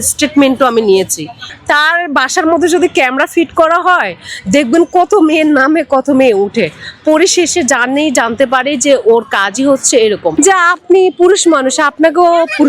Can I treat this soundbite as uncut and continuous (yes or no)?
no